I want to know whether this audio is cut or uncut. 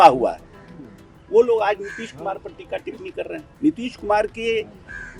cut